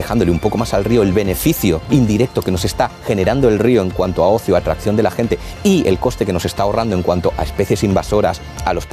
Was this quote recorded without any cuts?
no; 1 cut; at 1.8 s

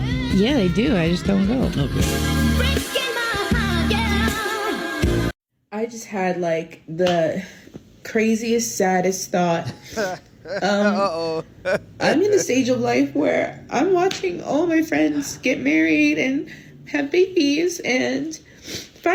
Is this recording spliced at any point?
no; 0 cuts

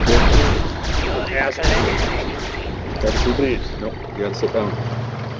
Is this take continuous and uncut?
yes; 0 cuts

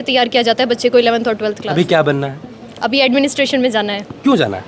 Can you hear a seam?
no; 0 cuts

